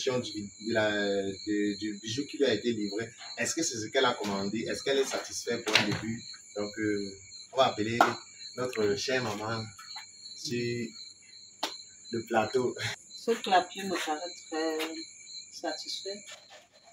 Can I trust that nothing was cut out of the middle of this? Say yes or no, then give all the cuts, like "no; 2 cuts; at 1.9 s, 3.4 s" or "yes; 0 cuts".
no; 1 cut; at 12.9 s